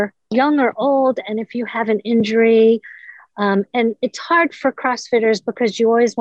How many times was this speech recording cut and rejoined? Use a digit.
0